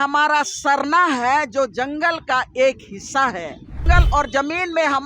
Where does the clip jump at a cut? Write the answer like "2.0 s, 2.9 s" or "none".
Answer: 3.8 s